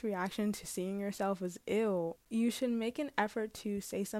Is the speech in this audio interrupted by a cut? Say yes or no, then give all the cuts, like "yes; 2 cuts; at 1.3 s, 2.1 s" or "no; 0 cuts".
yes; 1 cut; at 2.2 s